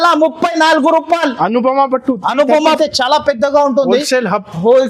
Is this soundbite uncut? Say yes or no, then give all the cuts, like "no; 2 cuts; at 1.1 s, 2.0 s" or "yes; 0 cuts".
no; 1 cut; at 2.6 s